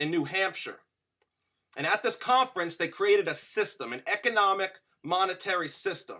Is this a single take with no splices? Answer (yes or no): no